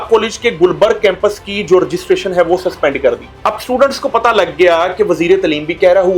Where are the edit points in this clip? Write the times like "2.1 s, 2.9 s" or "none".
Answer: none